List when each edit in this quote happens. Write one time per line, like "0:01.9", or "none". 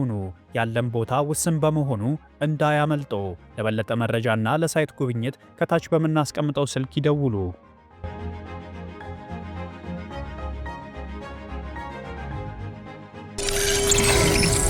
0:13.4